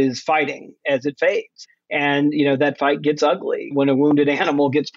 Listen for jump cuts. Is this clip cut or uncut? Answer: cut